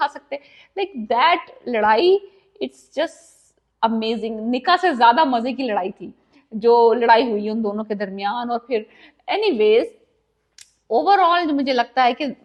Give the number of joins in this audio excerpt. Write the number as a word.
zero